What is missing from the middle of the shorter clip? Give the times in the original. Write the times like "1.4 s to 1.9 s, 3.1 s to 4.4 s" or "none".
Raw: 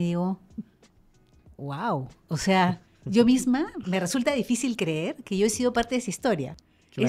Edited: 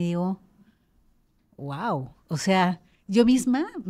none